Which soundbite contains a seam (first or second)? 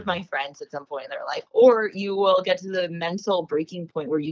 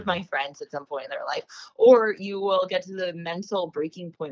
first